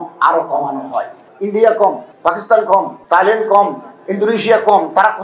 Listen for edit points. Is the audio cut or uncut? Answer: cut